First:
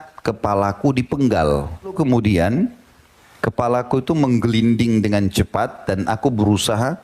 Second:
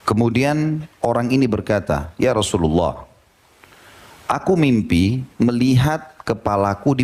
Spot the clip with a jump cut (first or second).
first